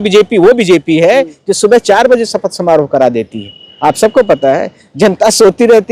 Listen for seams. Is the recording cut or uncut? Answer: uncut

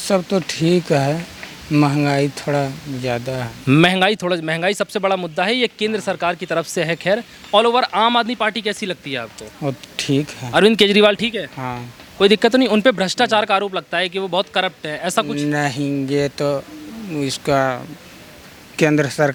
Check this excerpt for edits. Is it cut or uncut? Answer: uncut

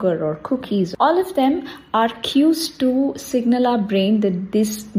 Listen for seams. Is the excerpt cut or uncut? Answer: cut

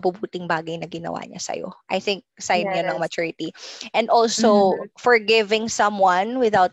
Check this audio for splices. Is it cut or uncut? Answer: uncut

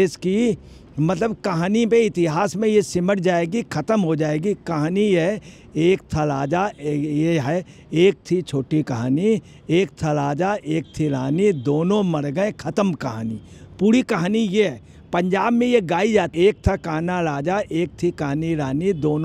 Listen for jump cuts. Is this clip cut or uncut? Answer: uncut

